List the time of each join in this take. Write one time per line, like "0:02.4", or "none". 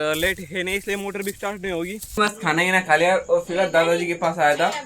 0:02.0